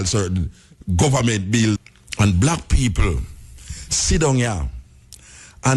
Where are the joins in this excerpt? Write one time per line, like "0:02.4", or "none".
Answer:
0:01.9